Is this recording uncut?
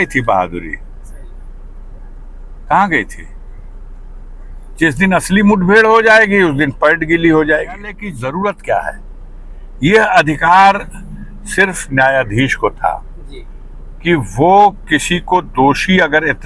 no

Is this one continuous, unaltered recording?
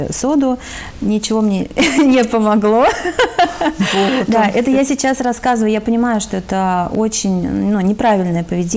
yes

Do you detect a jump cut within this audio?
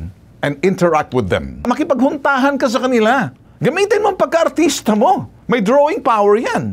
yes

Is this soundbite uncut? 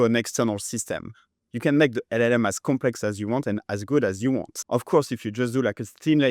no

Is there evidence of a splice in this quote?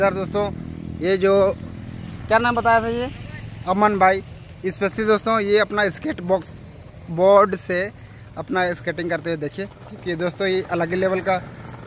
no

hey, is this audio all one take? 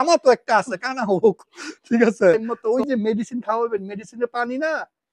no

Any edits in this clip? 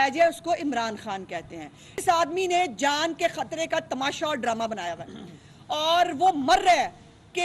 yes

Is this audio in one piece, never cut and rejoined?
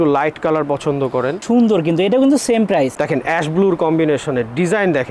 no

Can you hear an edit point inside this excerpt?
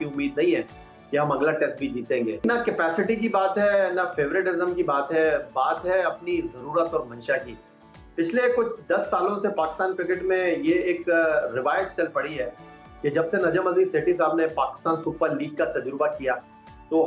yes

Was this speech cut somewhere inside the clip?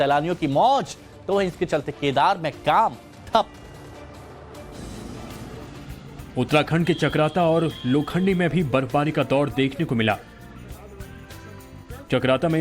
yes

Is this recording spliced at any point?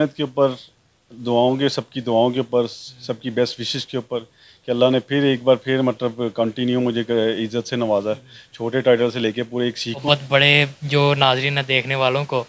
yes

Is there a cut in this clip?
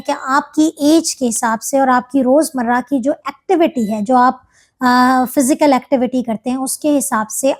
no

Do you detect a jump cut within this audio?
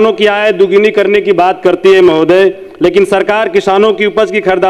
no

